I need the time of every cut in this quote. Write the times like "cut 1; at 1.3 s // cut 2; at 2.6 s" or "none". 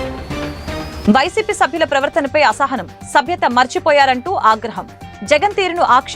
cut 1; at 0.9 s